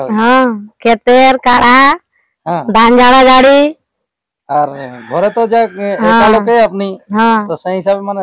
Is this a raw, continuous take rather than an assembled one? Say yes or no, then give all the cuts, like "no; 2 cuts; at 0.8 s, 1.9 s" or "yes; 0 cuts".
yes; 0 cuts